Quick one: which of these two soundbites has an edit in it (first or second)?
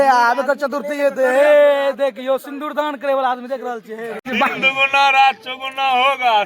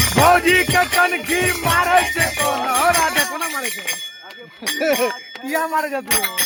first